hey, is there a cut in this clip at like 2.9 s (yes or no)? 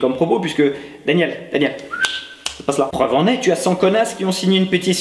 yes